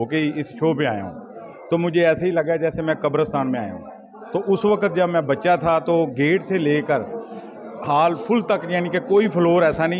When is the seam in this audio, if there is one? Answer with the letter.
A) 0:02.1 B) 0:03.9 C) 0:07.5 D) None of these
D